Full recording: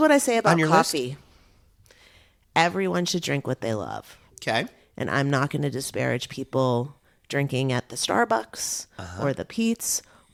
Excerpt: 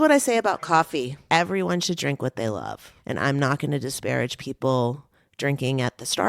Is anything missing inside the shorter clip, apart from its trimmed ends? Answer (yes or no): yes